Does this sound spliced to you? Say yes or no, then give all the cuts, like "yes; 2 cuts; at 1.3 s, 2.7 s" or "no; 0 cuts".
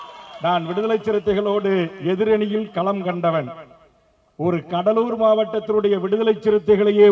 no; 0 cuts